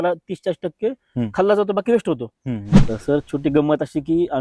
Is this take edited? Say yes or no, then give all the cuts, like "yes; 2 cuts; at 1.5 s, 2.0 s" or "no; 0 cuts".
yes; 1 cut; at 2.8 s